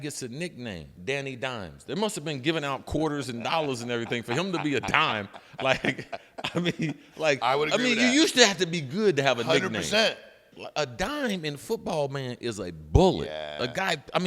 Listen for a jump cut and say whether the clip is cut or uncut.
cut